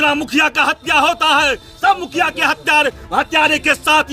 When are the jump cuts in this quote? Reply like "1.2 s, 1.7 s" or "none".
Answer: none